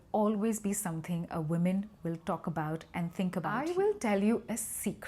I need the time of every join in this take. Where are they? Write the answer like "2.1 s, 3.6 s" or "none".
3.8 s